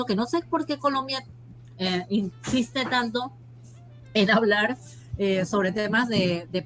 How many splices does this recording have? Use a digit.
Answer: 0